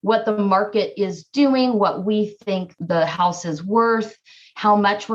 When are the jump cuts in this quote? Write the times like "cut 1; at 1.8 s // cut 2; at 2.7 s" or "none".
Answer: none